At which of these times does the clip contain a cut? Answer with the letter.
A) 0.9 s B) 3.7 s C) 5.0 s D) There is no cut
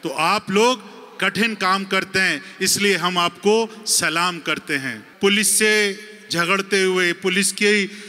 C